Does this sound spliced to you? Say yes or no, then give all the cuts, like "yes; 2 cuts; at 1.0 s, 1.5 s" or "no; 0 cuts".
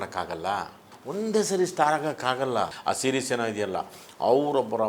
yes; 2 cuts; at 0.9 s, 2.8 s